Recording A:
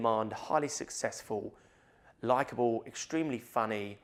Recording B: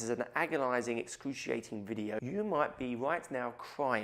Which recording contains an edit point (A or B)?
B